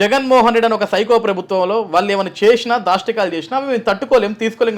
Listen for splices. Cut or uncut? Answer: uncut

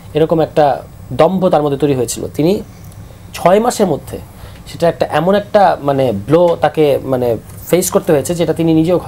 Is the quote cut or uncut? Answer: uncut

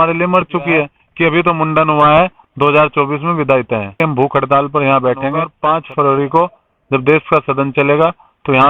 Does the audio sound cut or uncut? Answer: cut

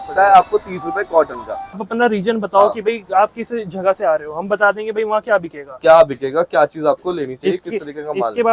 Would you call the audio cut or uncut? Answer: cut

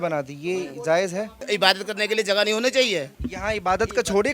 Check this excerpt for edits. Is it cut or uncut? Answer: cut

